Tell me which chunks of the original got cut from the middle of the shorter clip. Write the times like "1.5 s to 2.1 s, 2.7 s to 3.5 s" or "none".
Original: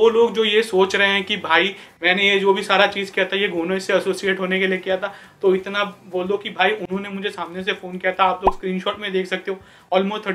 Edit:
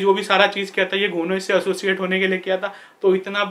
none